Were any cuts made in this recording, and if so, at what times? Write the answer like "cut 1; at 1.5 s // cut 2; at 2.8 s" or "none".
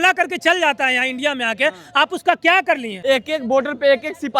cut 1; at 2.9 s